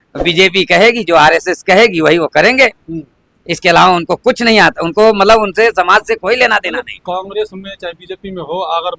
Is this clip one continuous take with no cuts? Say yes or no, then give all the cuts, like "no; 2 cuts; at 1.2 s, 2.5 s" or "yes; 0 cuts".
yes; 0 cuts